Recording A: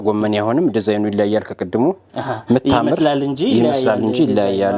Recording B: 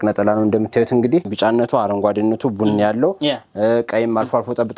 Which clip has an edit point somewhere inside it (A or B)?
B